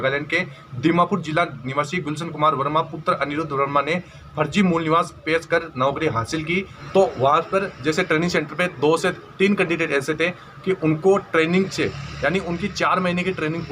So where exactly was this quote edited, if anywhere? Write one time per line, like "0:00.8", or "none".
0:06.8